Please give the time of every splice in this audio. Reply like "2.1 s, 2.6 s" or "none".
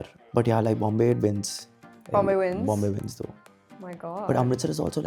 none